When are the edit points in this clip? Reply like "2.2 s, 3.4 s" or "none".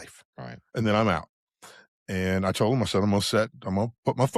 none